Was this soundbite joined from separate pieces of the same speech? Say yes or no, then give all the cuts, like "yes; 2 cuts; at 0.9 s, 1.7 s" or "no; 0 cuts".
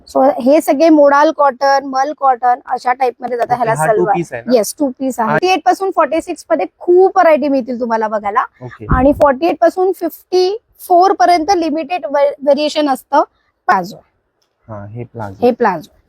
yes; 2 cuts; at 5.4 s, 13.7 s